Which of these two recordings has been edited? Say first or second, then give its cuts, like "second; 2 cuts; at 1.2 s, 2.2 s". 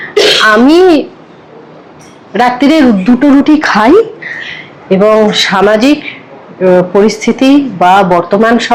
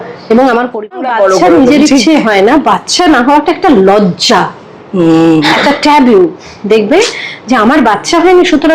second; 1 cut; at 1.1 s